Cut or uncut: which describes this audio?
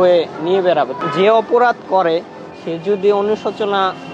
cut